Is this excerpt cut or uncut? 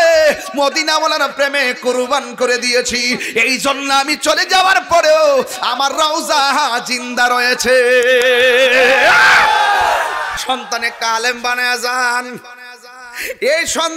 cut